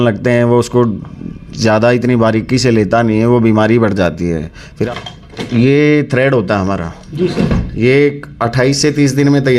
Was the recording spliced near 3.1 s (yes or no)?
no